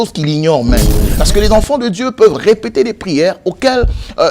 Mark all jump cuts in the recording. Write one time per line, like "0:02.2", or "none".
0:01.0